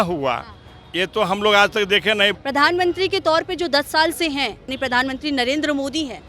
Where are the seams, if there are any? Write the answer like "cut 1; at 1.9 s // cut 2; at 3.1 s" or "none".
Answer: cut 1; at 2.3 s // cut 2; at 4.7 s